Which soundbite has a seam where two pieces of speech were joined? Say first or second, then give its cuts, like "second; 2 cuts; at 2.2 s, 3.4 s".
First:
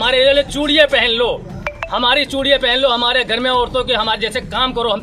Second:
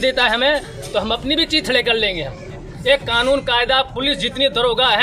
second; 1 cut; at 2.7 s